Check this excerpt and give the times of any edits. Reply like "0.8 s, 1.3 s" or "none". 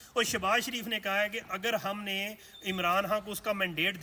none